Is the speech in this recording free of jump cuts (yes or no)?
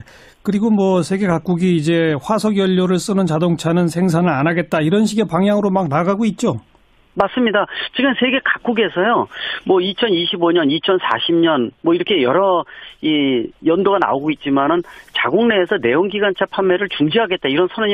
yes